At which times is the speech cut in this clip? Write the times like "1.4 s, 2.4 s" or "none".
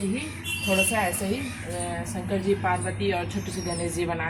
none